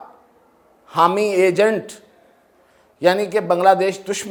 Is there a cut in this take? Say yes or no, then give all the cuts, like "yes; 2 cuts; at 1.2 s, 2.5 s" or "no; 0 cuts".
no; 0 cuts